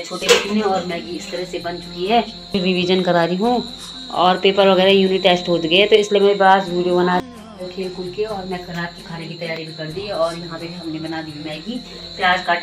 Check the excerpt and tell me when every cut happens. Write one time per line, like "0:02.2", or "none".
0:02.6
0:07.3